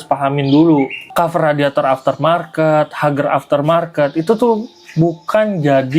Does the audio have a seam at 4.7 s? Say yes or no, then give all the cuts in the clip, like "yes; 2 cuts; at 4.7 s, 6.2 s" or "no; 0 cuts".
no; 1 cut; at 1.0 s